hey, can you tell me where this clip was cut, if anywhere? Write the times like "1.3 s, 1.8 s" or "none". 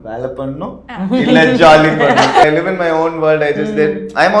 2.4 s